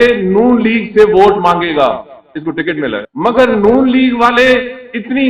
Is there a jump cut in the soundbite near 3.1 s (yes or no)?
yes